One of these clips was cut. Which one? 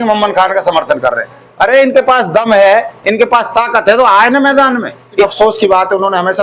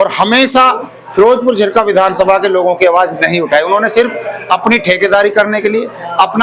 first; 1 cut; at 5.3 s

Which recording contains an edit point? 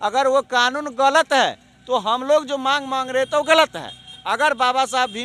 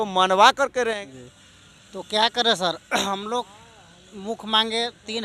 second; 1 cut; at 1.0 s

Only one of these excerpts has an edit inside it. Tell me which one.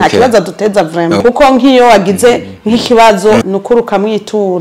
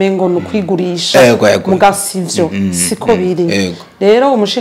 first; 2 cuts; at 1.2 s, 3.4 s

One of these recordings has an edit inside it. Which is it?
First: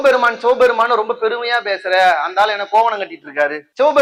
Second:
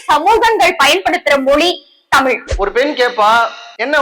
second; 1 cut; at 2.5 s

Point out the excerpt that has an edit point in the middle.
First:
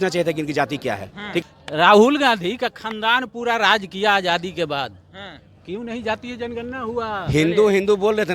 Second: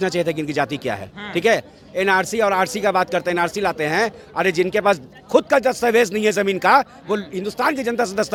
first; 1 cut; at 1.4 s

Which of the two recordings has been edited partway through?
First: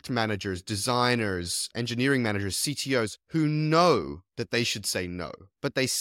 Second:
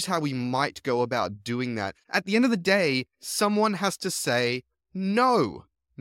second; 1 cut; at 2.0 s

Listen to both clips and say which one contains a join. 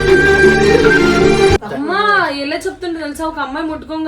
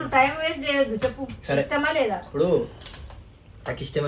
first; 1 cut; at 1.7 s

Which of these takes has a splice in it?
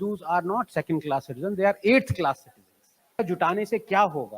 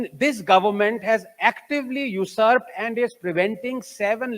first; 1 cut; at 3.2 s

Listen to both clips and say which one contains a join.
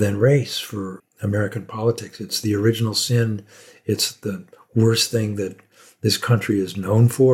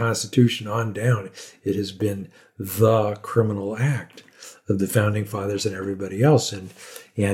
first; 1 cut; at 1.0 s

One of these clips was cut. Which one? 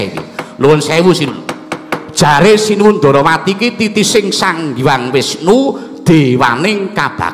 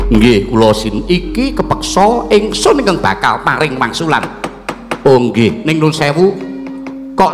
first; 1 cut; at 1.4 s

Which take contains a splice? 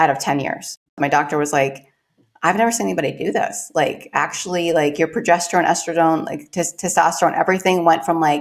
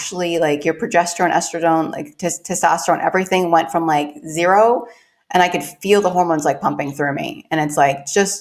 first; 1 cut; at 1.0 s

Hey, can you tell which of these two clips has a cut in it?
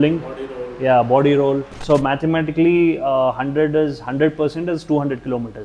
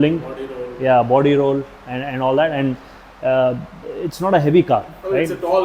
first; 1 cut; at 1.7 s

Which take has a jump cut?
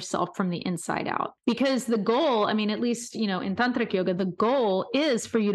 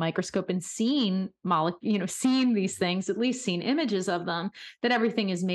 first; 1 cut; at 1.3 s

